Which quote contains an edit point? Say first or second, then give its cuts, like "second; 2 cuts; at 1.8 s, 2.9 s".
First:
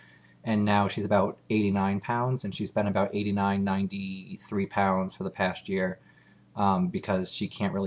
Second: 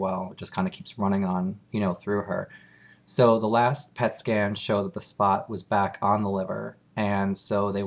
first; 1 cut; at 1.7 s